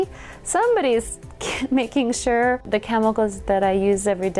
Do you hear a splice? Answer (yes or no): yes